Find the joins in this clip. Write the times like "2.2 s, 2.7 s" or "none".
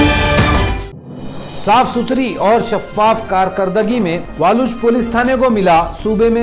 none